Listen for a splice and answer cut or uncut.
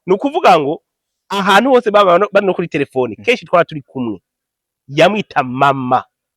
uncut